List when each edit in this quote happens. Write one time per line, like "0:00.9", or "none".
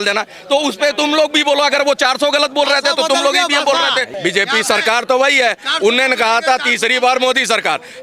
0:04.1